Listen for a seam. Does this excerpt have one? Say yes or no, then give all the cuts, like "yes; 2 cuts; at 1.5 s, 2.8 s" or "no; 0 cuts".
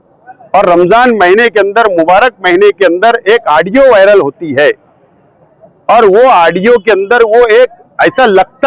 no; 0 cuts